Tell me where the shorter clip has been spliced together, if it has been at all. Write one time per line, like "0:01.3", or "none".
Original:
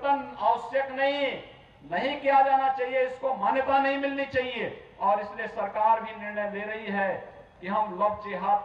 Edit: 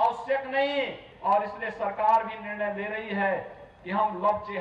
0:01.0

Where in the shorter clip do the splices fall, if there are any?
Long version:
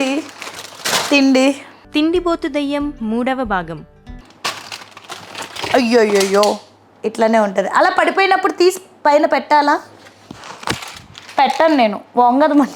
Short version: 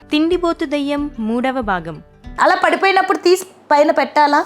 0:02.3

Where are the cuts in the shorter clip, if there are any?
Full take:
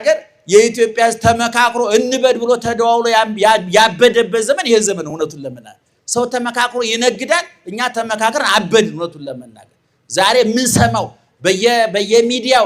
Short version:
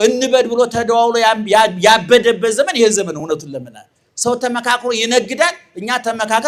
none

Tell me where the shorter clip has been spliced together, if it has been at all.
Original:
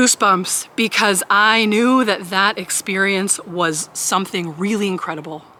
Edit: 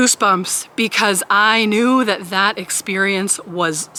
none

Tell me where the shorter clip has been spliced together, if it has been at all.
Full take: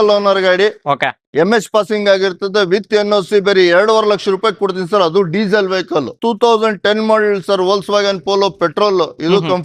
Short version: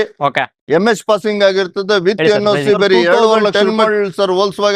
0:03.6

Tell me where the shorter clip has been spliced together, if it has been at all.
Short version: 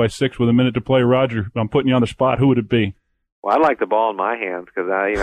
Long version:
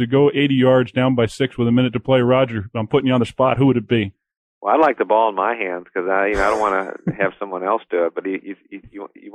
none

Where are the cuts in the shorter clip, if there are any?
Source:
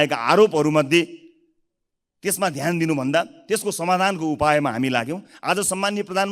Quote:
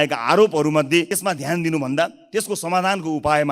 0:01.1

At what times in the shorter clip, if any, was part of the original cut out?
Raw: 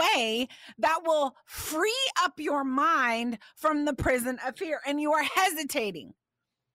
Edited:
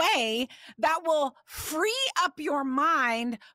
none

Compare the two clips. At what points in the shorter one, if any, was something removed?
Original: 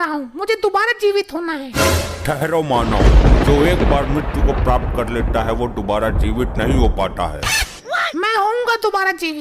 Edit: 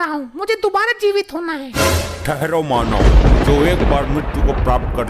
none

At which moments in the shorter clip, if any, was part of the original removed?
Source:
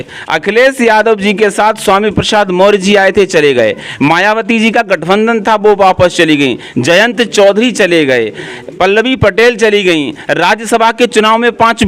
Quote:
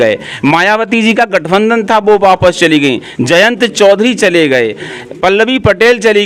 none

